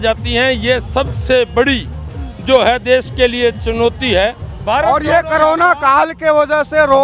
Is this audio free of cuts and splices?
no; 1 cut; at 4.5 s

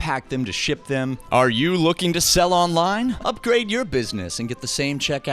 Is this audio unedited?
no; 2 cuts; at 1.2 s, 3.2 s

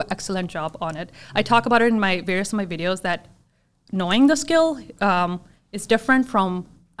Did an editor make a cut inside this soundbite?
no; 0 cuts

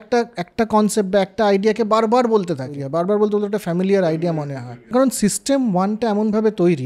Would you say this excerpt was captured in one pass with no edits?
no; 2 cuts; at 2.7 s, 4.9 s

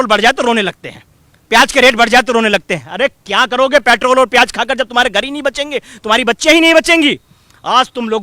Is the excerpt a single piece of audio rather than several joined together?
yes; 0 cuts

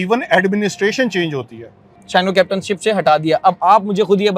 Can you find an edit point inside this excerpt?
yes; 1 cut; at 1.9 s

